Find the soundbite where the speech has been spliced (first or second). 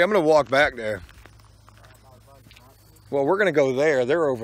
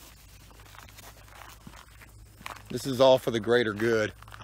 first